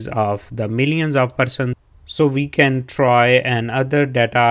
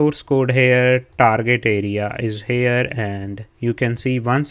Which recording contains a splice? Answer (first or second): first